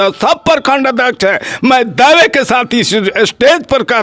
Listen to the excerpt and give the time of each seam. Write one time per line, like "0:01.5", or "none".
none

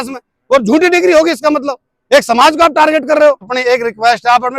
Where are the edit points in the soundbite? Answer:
0:03.5

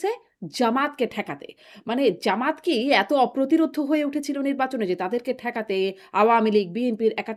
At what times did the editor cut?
none

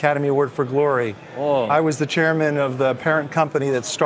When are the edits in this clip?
0:01.7

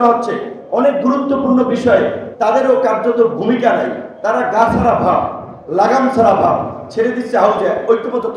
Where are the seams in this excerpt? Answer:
0:02.2
0:04.1

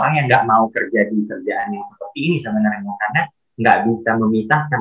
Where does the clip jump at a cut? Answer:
none

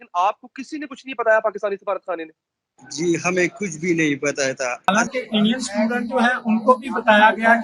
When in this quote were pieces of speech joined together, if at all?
0:04.9

